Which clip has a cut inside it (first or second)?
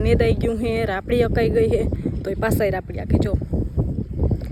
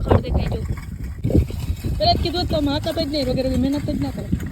second